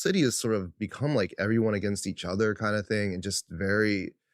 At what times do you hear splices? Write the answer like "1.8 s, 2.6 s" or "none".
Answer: none